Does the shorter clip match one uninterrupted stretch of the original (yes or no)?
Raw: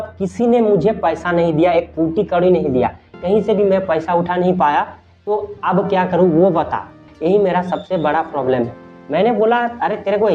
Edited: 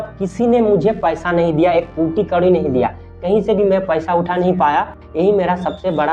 no